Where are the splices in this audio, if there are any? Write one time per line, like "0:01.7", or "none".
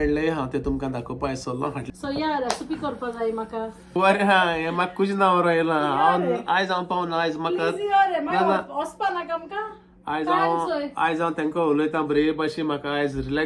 0:01.8
0:03.9